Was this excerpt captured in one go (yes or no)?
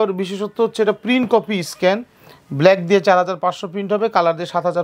yes